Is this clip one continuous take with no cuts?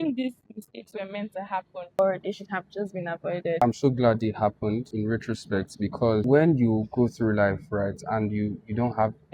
no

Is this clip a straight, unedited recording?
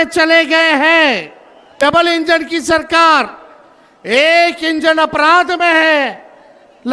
no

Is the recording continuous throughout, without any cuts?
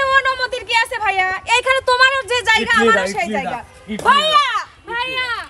yes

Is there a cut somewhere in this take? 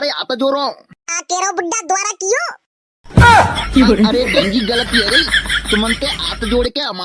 yes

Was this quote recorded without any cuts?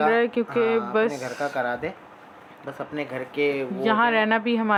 yes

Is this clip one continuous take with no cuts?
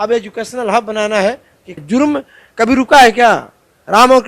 no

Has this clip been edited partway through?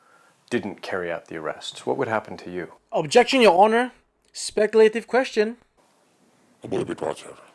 no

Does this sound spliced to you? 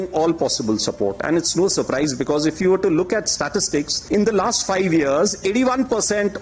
no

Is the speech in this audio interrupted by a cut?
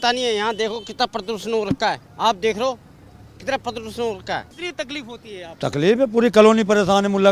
yes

